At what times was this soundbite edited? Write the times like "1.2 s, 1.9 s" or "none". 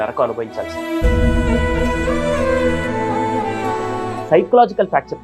4.2 s